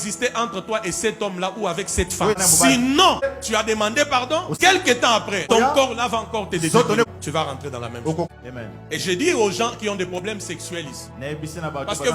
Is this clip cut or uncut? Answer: cut